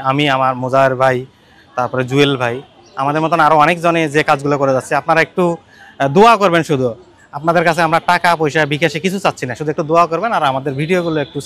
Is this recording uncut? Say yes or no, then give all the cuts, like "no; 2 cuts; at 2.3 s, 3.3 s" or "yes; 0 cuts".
yes; 0 cuts